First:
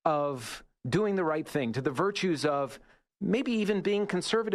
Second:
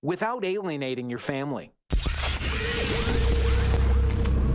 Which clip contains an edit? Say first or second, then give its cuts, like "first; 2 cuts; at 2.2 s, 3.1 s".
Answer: second; 1 cut; at 1.8 s